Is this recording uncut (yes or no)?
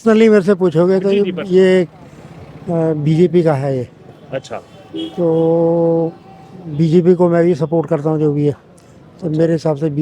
yes